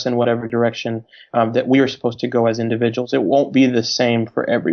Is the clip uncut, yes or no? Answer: yes